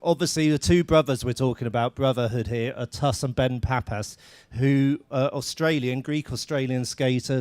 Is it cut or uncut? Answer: cut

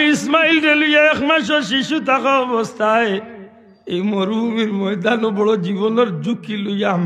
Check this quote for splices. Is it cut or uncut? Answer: uncut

